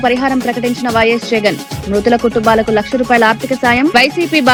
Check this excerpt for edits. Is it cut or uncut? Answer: uncut